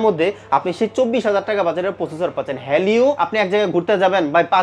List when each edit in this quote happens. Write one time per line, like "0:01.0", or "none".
0:03.2